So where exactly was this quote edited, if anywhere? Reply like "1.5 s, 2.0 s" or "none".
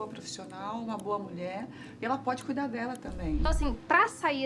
3.4 s